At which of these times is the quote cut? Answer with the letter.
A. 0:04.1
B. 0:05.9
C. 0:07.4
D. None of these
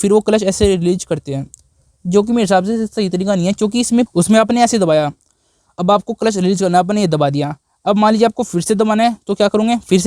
A